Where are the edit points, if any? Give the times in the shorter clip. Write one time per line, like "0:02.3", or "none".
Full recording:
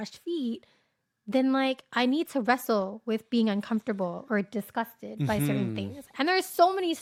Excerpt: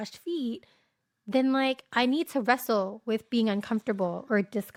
none